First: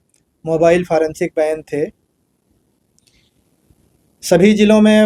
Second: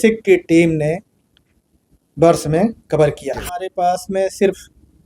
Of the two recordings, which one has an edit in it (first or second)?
second